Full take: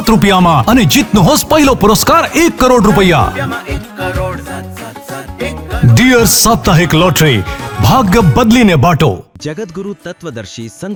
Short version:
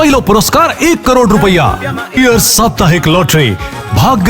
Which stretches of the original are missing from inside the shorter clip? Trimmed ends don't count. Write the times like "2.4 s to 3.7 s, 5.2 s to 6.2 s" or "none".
3.7 s to 6.0 s